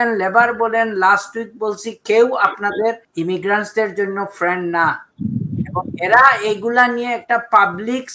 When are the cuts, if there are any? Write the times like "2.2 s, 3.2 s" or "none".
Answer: 3.1 s